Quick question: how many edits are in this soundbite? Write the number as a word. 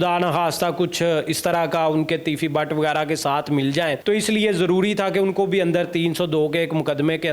one